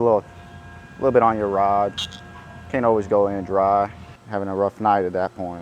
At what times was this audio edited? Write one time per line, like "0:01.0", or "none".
0:04.0